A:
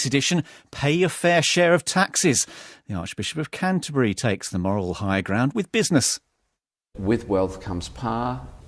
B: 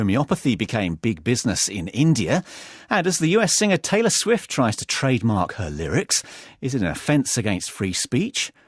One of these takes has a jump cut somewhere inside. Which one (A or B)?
B